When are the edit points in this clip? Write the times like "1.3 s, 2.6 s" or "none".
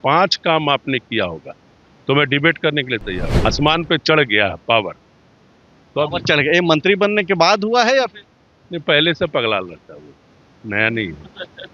3.4 s

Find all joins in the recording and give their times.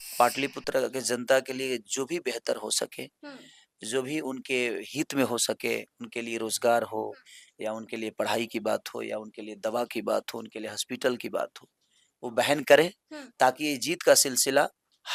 none

